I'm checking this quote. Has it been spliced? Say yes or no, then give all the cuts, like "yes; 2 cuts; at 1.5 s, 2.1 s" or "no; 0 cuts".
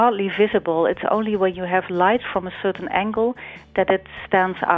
no; 0 cuts